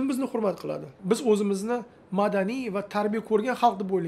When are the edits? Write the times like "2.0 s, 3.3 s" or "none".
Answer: 0.9 s